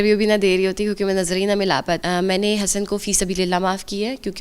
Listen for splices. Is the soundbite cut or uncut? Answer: cut